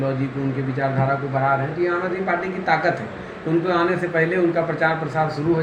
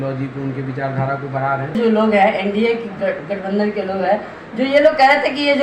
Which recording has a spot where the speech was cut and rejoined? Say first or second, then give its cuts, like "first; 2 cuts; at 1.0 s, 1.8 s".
second; 1 cut; at 1.8 s